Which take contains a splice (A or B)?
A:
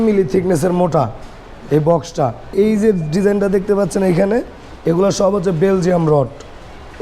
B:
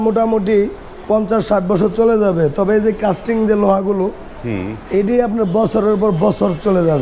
A